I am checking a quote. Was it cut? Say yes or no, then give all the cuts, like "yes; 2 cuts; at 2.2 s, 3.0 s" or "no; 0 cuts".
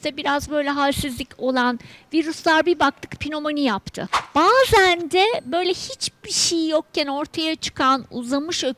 yes; 1 cut; at 4.2 s